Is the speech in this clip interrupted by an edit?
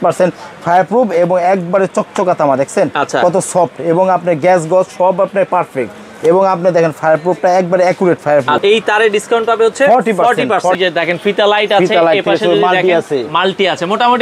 yes; 2 cuts; at 8.6 s, 10.8 s

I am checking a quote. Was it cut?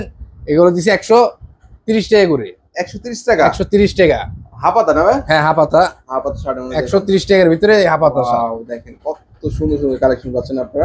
no; 0 cuts

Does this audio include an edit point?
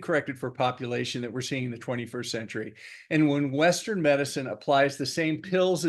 no; 0 cuts

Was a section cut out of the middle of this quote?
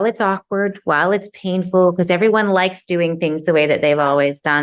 no; 0 cuts

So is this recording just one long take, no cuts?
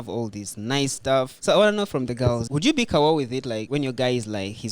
no; 3 cuts; at 1.3 s, 2.4 s, 3.6 s

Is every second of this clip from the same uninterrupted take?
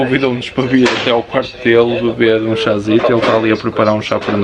yes; 0 cuts

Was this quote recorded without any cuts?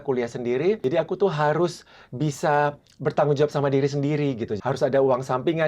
no; 3 cuts; at 0.8 s, 2.9 s, 4.6 s

